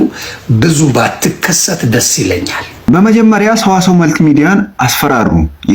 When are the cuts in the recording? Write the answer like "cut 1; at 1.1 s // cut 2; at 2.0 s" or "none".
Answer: cut 1; at 2.7 s